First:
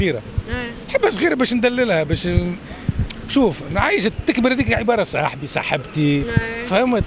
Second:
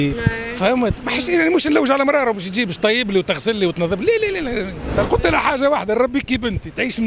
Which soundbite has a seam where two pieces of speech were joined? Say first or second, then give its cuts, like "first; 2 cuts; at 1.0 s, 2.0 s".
second; 1 cut; at 5.0 s